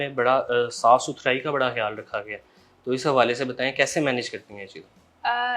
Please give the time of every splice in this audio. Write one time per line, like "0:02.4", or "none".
none